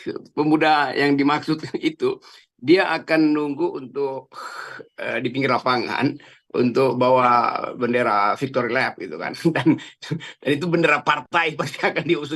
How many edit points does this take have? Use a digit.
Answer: 0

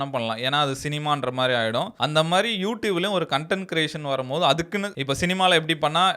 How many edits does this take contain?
1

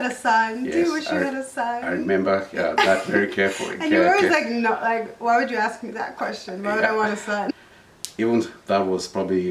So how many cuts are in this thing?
1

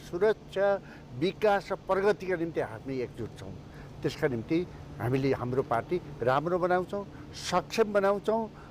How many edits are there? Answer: 0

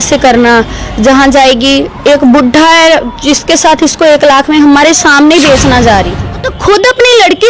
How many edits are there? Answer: 1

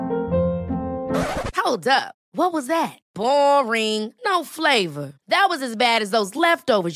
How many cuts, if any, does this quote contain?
0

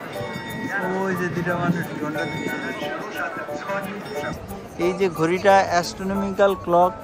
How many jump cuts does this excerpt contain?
1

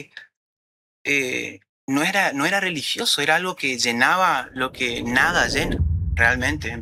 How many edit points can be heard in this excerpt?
0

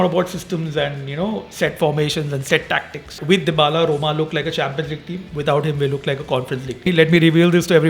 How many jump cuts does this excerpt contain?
2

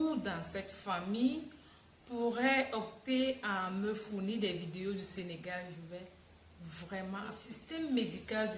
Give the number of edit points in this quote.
1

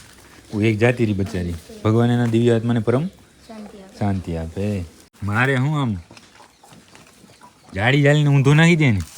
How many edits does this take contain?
1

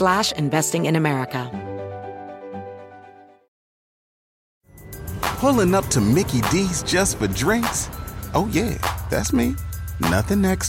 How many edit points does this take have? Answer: 1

